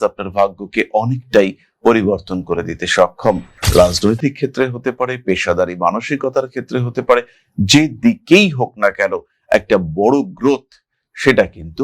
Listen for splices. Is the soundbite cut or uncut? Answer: cut